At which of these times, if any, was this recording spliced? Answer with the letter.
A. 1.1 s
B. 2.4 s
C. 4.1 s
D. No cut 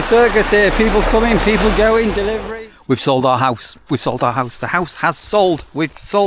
B